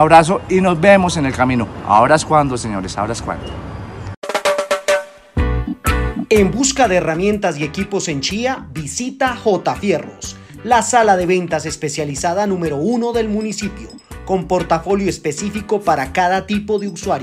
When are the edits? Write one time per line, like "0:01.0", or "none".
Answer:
0:04.2